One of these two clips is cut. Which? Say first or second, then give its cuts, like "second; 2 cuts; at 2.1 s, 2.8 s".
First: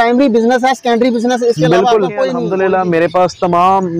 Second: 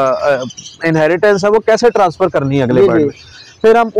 first; 1 cut; at 2.4 s